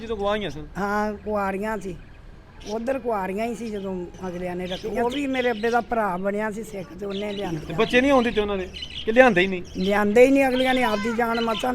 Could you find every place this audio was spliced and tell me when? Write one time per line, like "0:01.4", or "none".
0:04.8
0:07.6